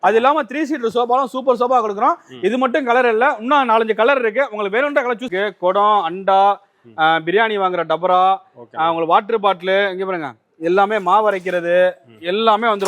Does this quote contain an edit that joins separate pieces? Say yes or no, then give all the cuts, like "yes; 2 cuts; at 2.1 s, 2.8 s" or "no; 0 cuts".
yes; 1 cut; at 5.3 s